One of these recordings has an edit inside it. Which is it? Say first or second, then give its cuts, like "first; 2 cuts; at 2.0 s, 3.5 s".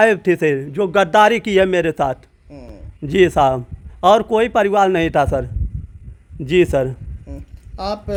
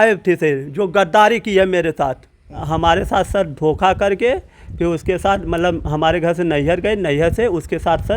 second; 1 cut; at 2.6 s